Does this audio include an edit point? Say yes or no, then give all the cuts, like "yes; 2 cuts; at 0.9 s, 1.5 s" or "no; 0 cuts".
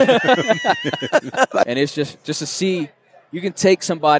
yes; 1 cut; at 1.6 s